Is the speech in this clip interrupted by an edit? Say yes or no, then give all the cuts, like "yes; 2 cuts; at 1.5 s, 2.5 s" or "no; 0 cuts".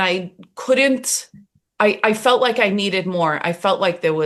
no; 0 cuts